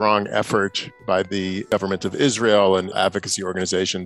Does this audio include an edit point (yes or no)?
yes